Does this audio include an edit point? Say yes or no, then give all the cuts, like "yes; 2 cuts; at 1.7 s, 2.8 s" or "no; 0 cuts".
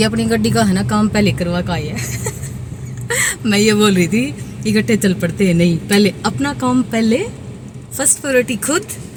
no; 0 cuts